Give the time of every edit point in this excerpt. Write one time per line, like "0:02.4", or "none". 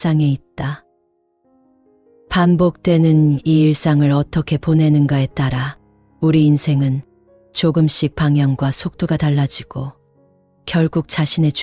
none